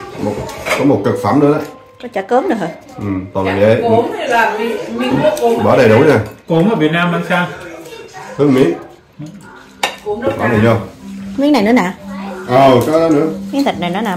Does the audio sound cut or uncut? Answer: uncut